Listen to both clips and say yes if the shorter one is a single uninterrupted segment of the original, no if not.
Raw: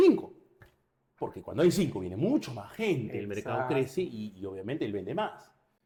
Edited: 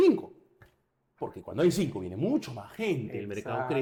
yes